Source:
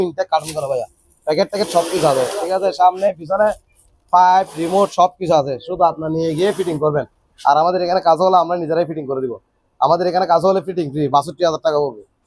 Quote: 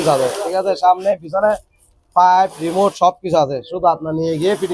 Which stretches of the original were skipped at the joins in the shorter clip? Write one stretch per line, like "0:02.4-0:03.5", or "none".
none